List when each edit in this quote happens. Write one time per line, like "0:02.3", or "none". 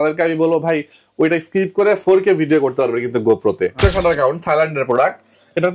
0:03.8

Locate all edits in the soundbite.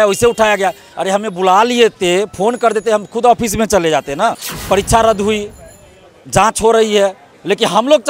0:04.5

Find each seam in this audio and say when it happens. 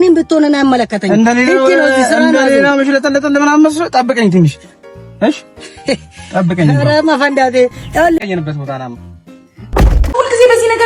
0:08.2
0:09.9

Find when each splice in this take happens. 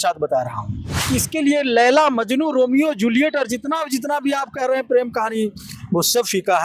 0:01.1

